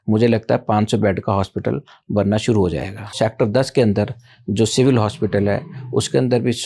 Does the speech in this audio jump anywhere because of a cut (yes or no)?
yes